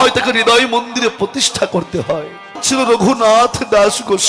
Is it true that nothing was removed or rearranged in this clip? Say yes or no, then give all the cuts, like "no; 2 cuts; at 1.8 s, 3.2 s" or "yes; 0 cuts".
no; 1 cut; at 2.6 s